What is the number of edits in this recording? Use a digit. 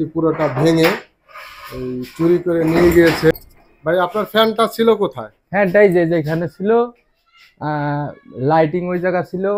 1